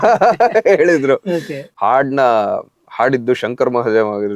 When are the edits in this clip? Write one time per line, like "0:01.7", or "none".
0:01.6

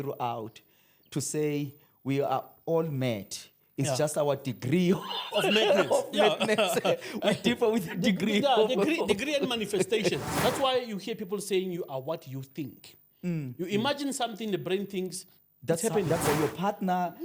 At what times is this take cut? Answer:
0:10.3
0:16.3

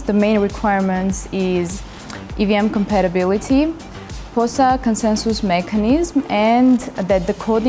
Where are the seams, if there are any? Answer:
none

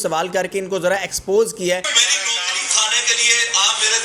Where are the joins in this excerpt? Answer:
0:01.9

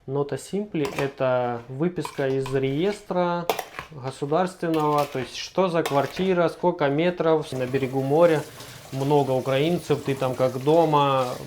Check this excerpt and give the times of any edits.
0:07.5

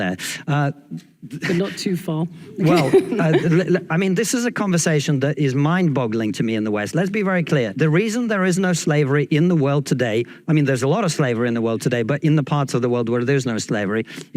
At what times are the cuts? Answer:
0:03.3

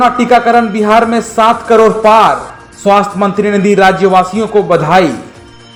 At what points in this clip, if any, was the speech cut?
none

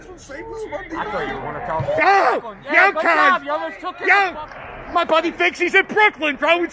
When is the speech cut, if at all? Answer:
0:04.4

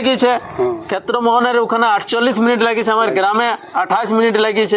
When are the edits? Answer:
none

